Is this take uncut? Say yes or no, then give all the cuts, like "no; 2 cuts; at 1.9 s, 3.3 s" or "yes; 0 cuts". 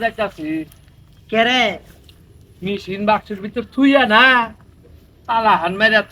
yes; 0 cuts